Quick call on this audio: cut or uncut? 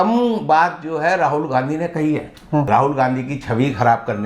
cut